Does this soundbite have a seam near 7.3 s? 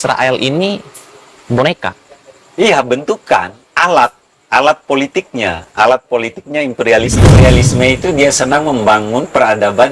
yes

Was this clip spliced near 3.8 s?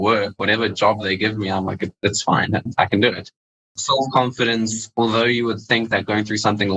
yes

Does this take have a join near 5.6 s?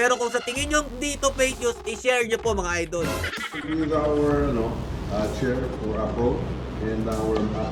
no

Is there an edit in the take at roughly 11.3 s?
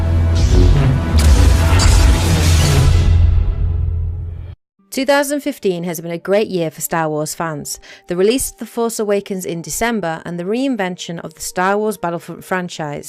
no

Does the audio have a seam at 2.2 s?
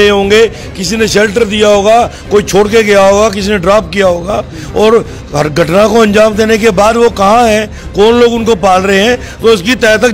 no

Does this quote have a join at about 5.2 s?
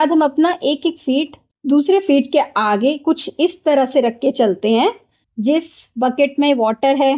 yes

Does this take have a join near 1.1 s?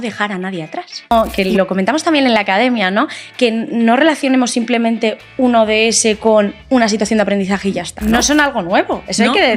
yes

